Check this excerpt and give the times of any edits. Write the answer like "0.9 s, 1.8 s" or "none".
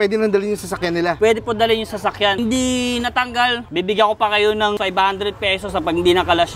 2.4 s, 4.8 s